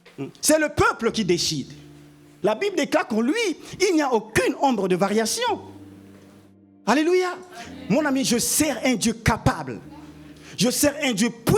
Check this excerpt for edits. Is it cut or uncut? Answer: cut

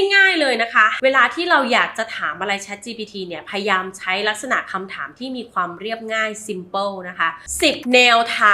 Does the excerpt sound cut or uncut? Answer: cut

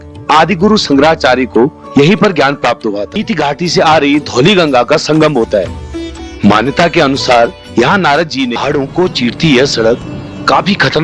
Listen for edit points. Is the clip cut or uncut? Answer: cut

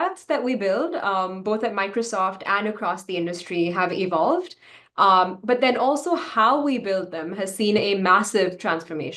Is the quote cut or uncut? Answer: uncut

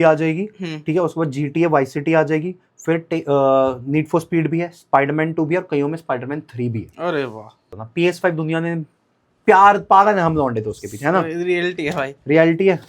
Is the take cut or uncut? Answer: cut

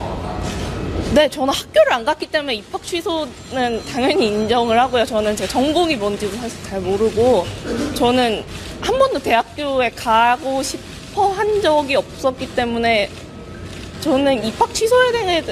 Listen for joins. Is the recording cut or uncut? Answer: cut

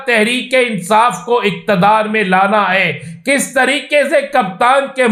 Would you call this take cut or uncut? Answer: uncut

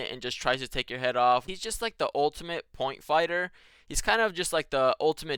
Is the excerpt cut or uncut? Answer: cut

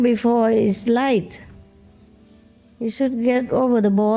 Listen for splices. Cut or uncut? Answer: uncut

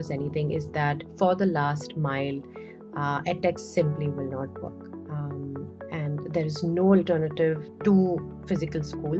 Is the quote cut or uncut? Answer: cut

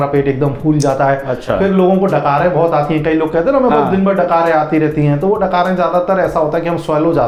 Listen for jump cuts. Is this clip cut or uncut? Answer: uncut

